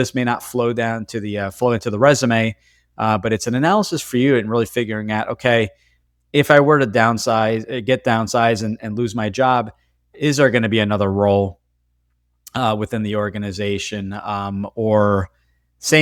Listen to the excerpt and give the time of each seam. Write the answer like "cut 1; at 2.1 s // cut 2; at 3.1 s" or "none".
none